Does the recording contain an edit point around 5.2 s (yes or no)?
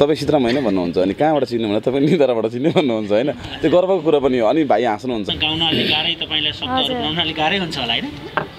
yes